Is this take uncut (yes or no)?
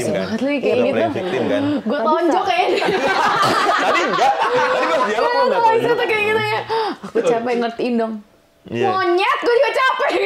yes